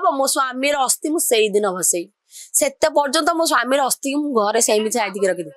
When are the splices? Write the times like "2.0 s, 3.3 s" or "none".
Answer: none